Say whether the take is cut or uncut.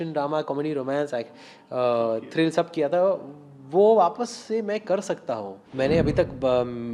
cut